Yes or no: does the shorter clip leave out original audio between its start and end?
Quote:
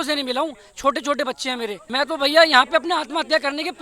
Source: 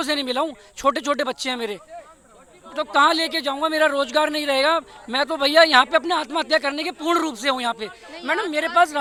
yes